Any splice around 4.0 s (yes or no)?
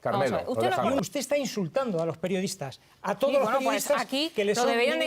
no